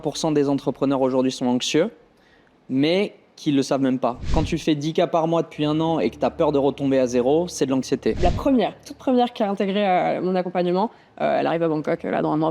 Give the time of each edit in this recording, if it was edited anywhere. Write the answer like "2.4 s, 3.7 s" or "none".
4.3 s, 8.2 s